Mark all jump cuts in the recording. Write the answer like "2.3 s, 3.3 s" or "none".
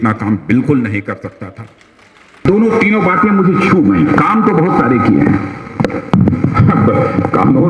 2.5 s